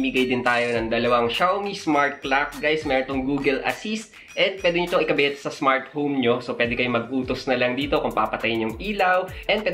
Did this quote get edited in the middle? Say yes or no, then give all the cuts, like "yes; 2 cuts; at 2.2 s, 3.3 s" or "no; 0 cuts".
no; 0 cuts